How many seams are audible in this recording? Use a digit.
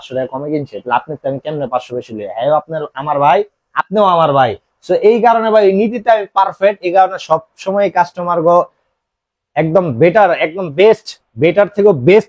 0